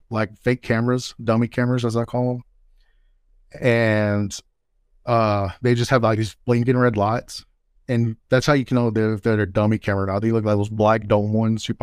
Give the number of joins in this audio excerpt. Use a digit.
0